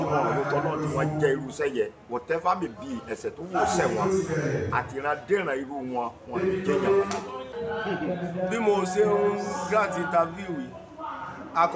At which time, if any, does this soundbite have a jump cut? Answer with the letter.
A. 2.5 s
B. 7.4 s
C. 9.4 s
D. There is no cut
B